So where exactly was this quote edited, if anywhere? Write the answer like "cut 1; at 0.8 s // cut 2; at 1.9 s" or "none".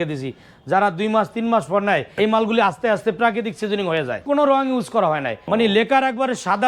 cut 1; at 2.1 s // cut 2; at 4.2 s // cut 3; at 5.4 s